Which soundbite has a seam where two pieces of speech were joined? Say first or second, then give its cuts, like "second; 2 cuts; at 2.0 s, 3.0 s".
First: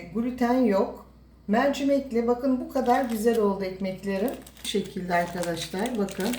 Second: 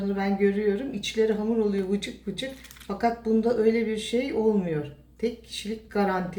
first; 1 cut; at 4.5 s